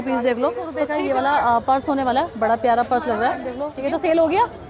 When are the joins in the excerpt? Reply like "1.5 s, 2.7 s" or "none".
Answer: 0.8 s, 3.7 s